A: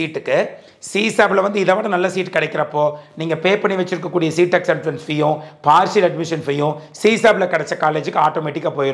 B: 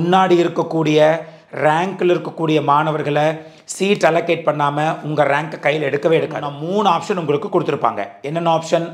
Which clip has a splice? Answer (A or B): B